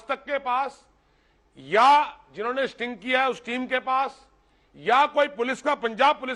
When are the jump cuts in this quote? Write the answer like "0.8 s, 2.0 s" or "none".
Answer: none